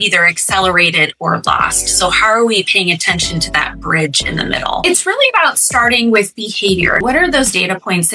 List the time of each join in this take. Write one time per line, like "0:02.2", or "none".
0:04.8
0:07.0